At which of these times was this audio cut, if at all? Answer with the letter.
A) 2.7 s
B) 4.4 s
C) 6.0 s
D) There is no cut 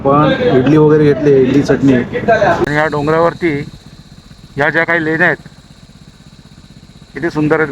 A